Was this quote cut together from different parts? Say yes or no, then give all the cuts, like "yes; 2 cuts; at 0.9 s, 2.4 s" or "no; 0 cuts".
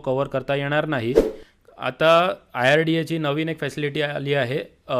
yes; 1 cut; at 1.4 s